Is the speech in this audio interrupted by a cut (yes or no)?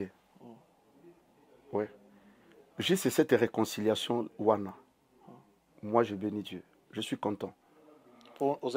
no